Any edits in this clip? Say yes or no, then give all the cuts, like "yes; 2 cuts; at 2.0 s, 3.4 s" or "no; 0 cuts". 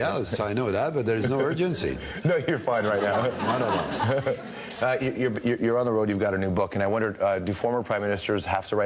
no; 0 cuts